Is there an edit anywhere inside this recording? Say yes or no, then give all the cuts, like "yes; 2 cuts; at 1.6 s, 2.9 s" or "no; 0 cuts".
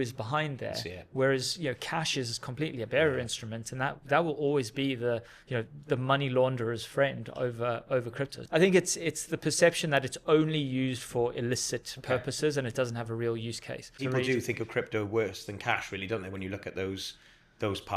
yes; 2 cuts; at 8.4 s, 14.0 s